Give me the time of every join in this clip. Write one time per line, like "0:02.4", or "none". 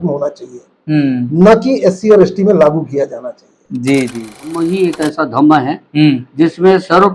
0:04.6

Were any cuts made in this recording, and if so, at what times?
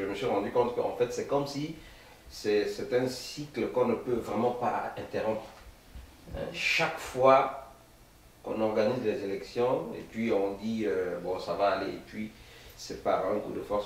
none

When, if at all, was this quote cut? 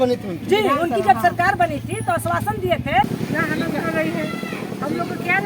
0:03.1

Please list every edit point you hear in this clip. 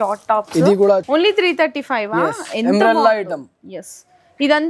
0:01.0

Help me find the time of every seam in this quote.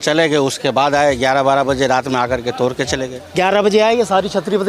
0:03.2

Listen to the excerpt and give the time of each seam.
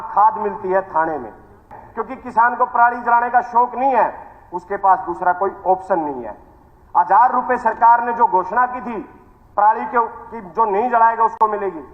0:01.8

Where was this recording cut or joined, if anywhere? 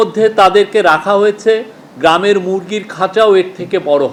none

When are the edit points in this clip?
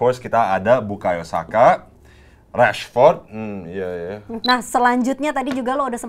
0:04.4

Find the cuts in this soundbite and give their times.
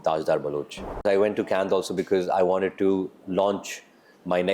0:01.0

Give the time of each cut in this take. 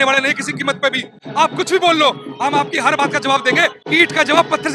0:03.8

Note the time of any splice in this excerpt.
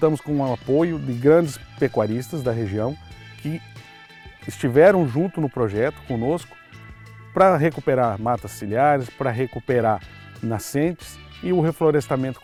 none

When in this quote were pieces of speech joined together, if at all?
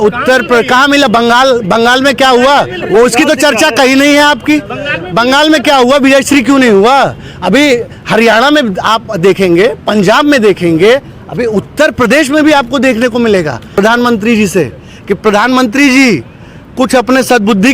0:13.6

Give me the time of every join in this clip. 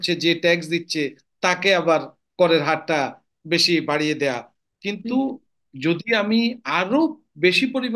none

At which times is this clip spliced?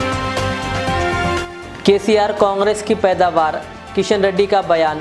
0:01.4

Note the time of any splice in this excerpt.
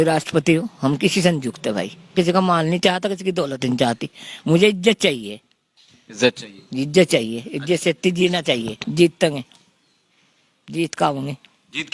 0:02.1
0:08.8

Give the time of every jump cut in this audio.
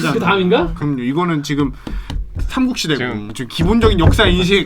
0:03.2

